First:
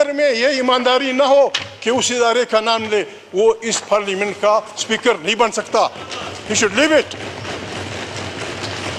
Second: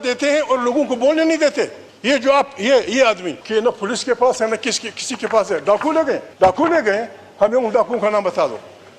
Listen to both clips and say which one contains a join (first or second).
second